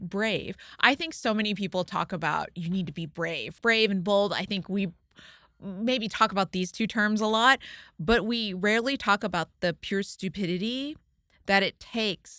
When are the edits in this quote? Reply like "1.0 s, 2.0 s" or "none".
3.5 s